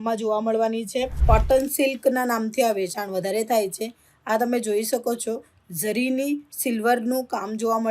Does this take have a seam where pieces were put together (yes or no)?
yes